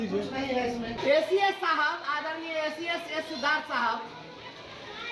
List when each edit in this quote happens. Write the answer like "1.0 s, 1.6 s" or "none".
0.9 s